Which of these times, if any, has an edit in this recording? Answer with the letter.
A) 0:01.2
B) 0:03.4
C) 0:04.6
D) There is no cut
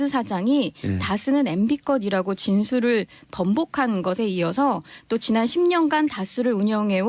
C